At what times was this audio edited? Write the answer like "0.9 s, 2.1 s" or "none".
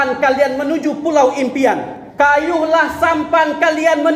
2.0 s